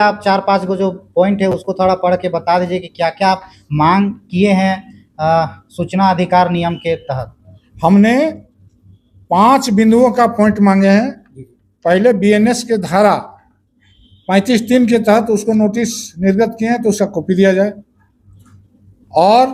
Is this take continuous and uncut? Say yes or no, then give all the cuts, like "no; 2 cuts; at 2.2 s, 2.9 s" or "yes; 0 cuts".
yes; 0 cuts